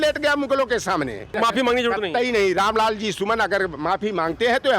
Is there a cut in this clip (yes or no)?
yes